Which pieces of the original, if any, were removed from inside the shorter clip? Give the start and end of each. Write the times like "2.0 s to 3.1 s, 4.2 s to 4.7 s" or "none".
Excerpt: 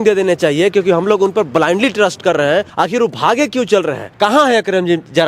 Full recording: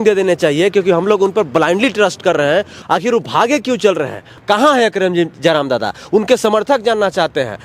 2.7 s to 2.8 s, 4.1 s to 4.3 s